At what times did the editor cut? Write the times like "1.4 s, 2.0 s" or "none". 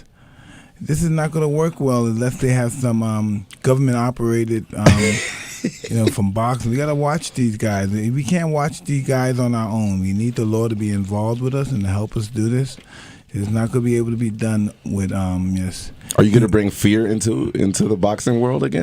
2.7 s